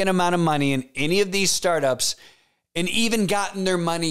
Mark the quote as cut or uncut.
uncut